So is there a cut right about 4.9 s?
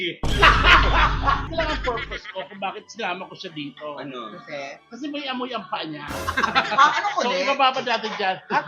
no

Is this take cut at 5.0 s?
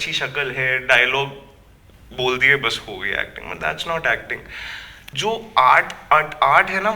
yes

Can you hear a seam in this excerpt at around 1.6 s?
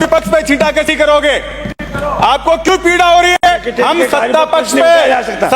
no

